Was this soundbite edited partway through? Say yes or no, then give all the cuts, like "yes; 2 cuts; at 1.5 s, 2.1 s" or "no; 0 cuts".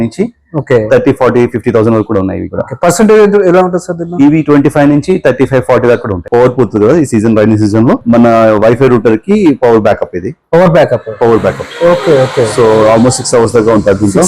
yes; 2 cuts; at 6.2 s, 8.0 s